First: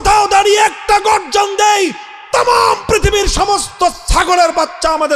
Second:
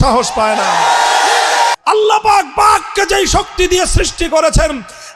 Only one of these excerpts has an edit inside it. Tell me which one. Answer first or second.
second